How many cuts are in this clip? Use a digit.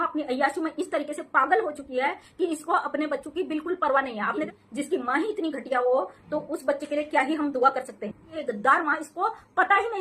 2